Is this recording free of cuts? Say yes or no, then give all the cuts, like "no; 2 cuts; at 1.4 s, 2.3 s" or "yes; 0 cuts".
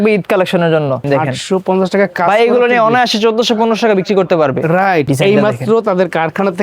no; 2 cuts; at 1.0 s, 5.1 s